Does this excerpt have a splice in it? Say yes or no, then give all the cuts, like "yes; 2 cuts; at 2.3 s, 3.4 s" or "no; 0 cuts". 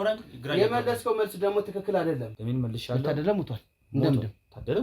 yes; 1 cut; at 2.4 s